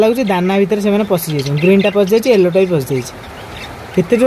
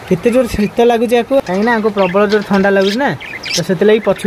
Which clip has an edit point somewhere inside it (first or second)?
second